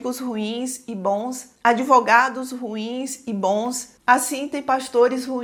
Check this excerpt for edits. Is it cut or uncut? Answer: uncut